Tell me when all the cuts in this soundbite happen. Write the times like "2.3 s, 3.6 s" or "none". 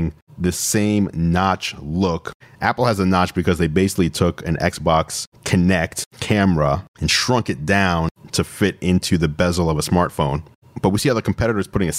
2.3 s